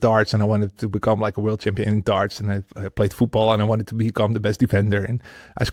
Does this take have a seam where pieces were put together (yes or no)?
no